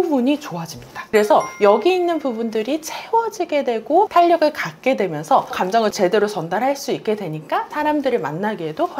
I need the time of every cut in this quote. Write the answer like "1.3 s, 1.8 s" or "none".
1.1 s